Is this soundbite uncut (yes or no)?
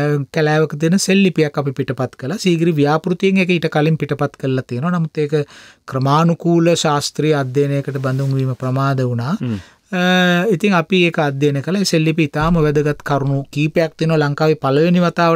yes